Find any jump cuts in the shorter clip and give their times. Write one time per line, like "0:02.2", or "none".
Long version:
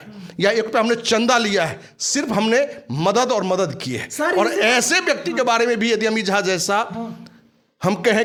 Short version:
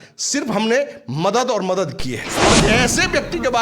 0:02.4